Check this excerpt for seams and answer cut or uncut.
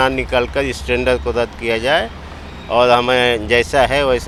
uncut